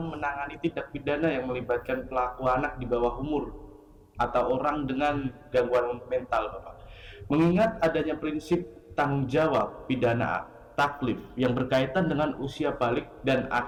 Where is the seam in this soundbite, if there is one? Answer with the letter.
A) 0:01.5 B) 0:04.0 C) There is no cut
C